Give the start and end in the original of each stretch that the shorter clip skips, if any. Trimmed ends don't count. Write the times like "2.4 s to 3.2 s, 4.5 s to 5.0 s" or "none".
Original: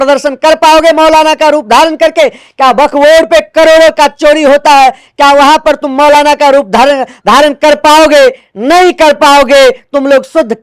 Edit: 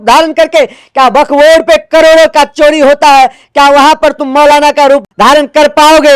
6.7 s to 7.1 s